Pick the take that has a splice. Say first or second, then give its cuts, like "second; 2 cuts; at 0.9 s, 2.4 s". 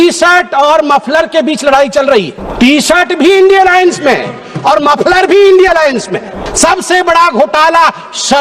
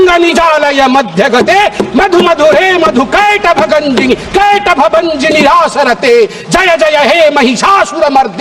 first; 2 cuts; at 2.4 s, 6.5 s